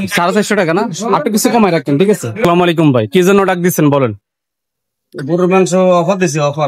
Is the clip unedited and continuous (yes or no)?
no